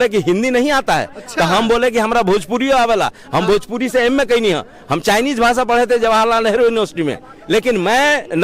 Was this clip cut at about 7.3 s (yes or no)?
yes